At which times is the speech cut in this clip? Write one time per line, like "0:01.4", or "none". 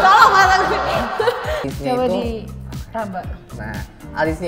0:01.7